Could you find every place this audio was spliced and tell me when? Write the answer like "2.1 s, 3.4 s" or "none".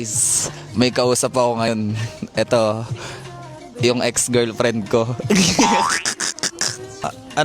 1.7 s